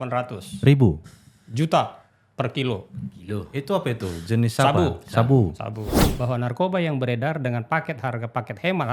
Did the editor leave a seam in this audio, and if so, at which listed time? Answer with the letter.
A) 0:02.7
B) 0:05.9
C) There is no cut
B